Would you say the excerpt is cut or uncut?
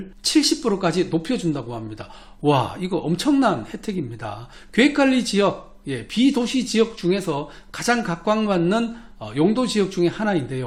uncut